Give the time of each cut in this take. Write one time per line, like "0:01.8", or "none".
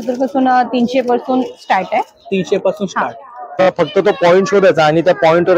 0:03.7